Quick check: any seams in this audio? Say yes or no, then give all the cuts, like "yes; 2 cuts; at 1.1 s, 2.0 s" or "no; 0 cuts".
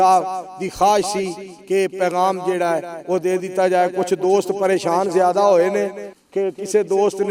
no; 0 cuts